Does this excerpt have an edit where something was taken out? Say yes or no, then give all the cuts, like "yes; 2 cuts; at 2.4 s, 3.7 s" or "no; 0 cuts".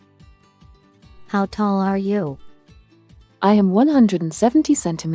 yes; 1 cut; at 1.3 s